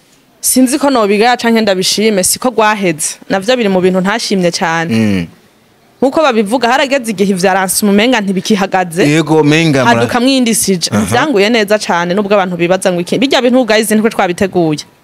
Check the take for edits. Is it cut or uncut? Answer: uncut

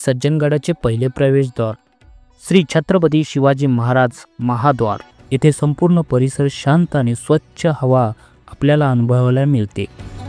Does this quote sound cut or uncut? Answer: cut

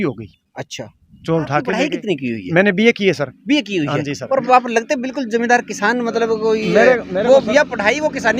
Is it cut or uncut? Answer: cut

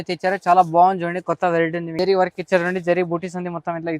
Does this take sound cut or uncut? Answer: cut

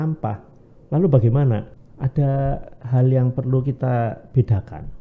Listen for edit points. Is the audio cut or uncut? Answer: cut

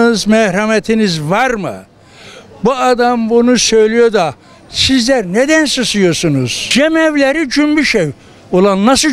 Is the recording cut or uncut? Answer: cut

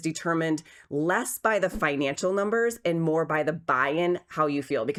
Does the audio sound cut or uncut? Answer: uncut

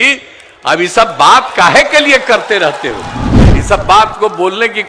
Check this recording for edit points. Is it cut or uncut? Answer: cut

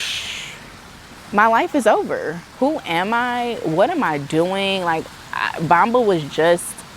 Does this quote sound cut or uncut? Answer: cut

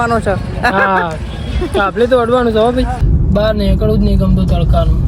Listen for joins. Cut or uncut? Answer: cut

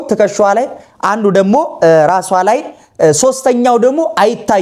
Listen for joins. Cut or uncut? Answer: uncut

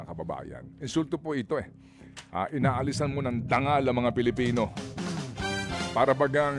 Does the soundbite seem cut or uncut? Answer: uncut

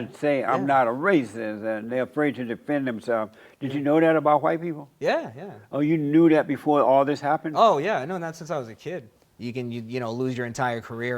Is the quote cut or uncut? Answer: cut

